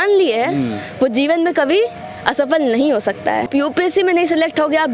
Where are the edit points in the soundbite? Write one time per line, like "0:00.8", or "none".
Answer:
0:03.5